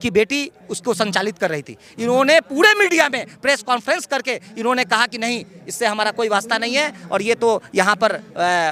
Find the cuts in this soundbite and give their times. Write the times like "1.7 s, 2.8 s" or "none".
none